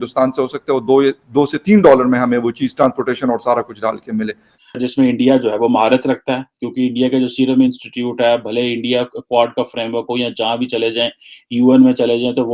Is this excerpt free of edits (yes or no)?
no